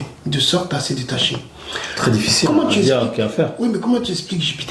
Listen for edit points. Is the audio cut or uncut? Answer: uncut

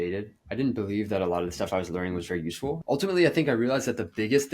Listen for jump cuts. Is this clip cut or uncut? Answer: cut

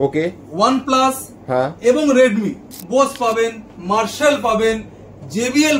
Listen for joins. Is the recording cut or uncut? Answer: cut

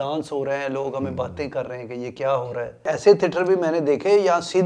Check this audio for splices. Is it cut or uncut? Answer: cut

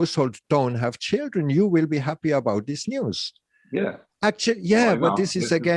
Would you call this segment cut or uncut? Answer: uncut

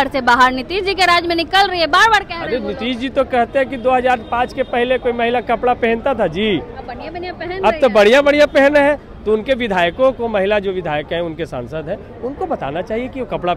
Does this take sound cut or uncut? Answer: uncut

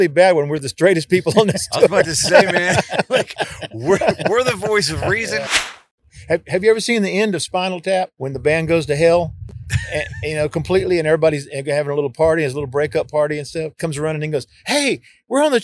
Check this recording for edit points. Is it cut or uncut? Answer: cut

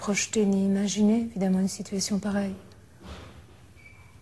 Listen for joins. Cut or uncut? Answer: cut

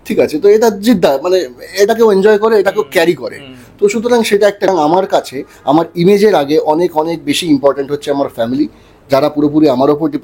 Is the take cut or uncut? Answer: cut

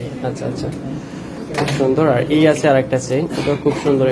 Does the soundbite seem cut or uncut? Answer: uncut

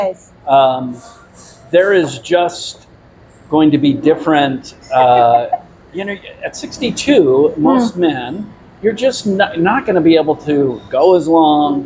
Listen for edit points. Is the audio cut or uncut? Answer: uncut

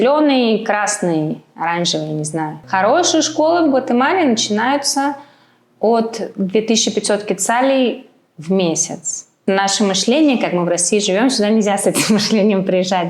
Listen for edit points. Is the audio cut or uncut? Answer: cut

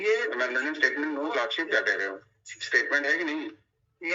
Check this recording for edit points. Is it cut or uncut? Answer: uncut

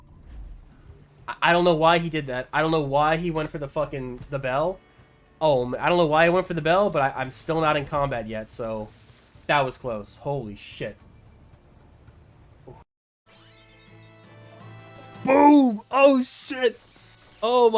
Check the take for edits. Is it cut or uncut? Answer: cut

